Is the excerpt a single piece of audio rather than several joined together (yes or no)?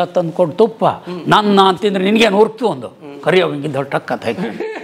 yes